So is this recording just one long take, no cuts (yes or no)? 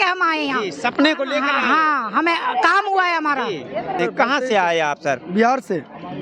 no